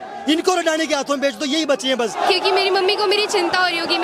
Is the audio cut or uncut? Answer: cut